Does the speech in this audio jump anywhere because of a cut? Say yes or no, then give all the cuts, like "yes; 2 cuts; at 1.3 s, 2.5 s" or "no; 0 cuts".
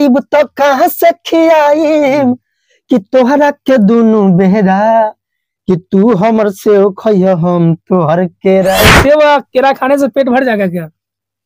yes; 1 cut; at 8.8 s